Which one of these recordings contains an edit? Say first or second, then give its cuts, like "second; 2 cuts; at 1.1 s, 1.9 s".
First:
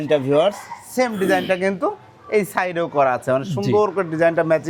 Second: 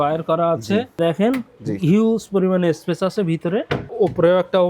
second; 2 cuts; at 1.0 s, 3.9 s